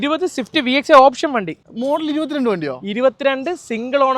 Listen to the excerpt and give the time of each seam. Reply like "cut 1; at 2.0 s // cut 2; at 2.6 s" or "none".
cut 1; at 1.6 s